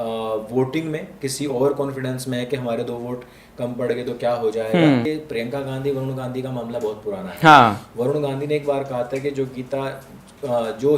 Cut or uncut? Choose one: cut